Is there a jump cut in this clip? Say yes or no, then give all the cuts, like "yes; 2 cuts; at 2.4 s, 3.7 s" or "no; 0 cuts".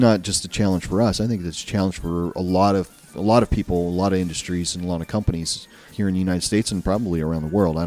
no; 0 cuts